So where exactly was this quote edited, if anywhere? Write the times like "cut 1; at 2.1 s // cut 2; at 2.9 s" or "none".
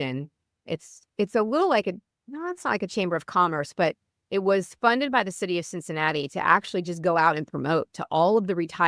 none